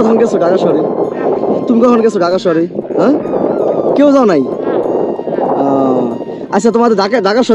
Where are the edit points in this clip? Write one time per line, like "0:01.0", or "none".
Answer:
none